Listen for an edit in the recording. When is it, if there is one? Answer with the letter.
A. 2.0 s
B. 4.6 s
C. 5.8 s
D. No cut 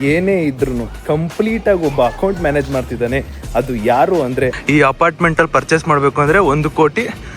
B